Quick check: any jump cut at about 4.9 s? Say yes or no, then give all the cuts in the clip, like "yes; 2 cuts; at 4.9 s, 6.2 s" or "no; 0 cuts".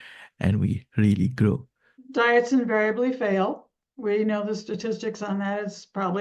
no; 1 cut; at 1.9 s